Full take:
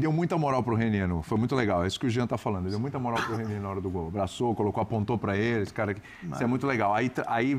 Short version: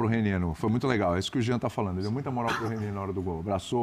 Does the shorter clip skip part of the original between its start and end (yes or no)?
no